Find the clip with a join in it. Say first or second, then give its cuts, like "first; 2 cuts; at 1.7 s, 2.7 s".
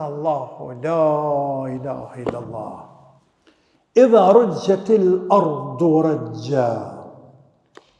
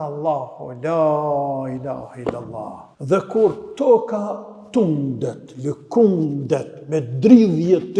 second; 1 cut; at 2.9 s